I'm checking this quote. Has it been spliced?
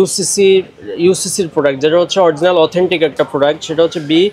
no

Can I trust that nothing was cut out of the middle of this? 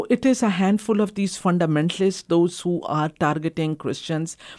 yes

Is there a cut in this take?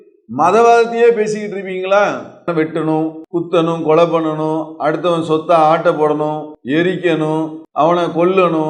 yes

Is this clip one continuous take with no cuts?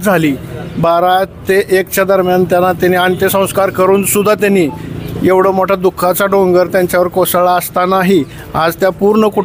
yes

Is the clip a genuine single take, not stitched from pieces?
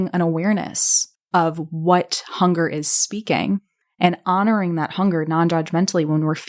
yes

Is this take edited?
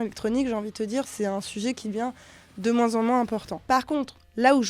yes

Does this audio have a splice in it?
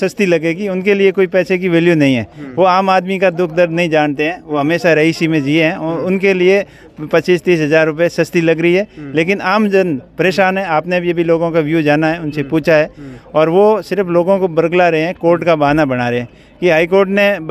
no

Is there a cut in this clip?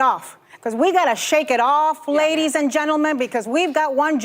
yes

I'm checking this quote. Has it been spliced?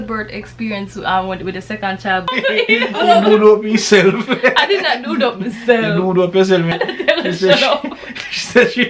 yes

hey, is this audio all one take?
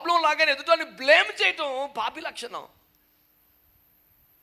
yes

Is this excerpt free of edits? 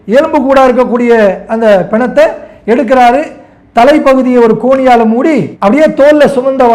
yes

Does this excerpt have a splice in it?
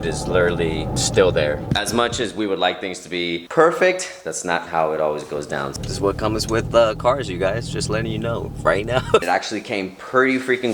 yes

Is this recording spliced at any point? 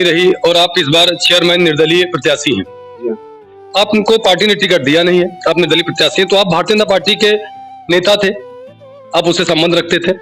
no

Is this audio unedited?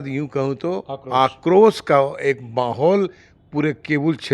yes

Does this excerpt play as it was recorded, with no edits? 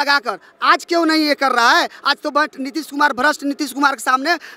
yes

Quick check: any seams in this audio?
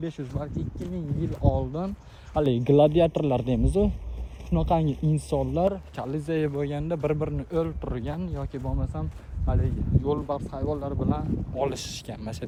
no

